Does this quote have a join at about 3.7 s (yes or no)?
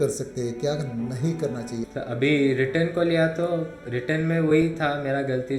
no